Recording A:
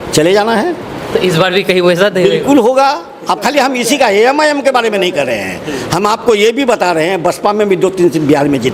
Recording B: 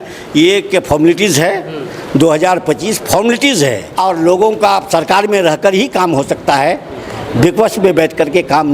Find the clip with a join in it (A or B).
B